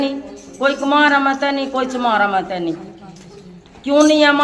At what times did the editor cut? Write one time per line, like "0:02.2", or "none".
none